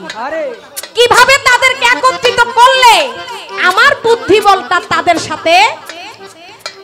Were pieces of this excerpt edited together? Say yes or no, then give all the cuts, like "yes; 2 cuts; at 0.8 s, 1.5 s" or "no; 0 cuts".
no; 0 cuts